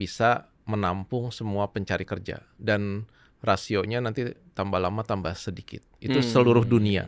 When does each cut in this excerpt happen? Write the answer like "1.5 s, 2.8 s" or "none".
none